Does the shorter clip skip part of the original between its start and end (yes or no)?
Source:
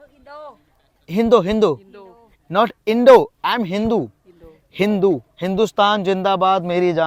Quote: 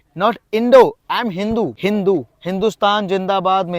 yes